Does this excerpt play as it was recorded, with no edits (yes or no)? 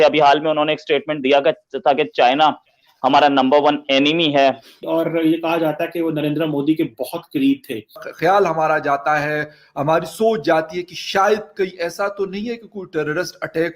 no